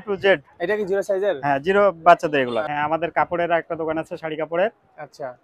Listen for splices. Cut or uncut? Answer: cut